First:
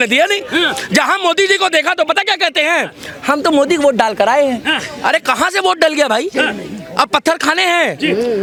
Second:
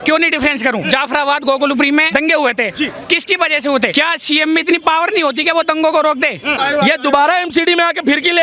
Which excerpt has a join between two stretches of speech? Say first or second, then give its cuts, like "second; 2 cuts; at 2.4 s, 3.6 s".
second; 4 cuts; at 0.8 s, 2.1 s, 3.9 s, 6.6 s